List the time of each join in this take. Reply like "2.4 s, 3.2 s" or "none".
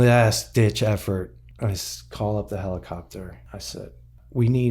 1.4 s, 3.8 s

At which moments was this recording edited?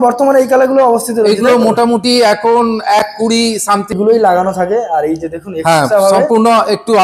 4.0 s

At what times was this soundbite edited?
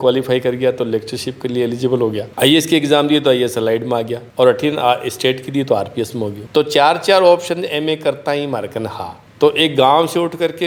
none

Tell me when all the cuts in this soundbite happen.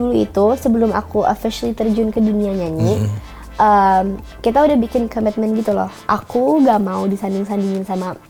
none

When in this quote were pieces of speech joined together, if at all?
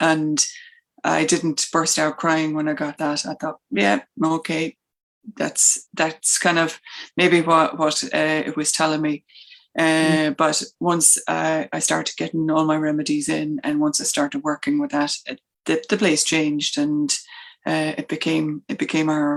none

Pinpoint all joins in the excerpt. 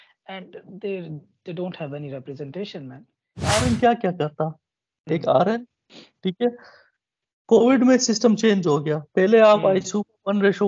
3.6 s

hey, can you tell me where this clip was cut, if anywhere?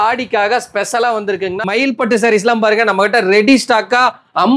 1.6 s

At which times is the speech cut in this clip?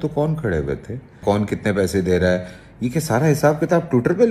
1.2 s

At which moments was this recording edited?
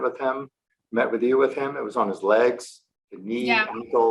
none

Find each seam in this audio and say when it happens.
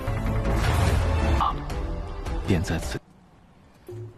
none

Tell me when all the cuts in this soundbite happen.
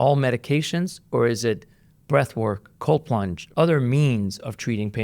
2.7 s, 3.4 s

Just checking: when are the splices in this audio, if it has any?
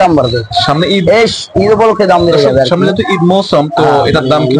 none

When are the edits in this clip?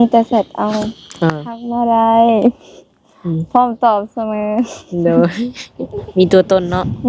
1.6 s

